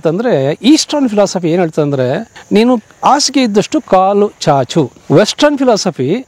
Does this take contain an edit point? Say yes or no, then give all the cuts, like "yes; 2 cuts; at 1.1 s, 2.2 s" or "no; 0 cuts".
yes; 2 cuts; at 2.3 s, 5.0 s